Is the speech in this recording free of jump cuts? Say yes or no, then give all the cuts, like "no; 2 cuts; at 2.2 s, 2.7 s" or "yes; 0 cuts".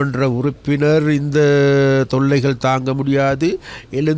yes; 0 cuts